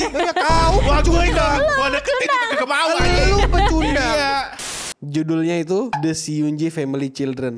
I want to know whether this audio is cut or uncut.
cut